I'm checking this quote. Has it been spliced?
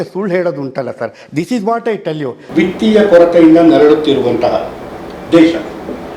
yes; 1 cut; at 2.4 s

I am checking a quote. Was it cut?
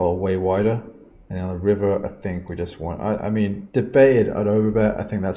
yes; 1 cut; at 3.6 s

